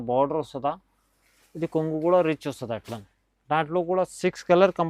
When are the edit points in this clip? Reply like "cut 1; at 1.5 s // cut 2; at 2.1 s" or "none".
none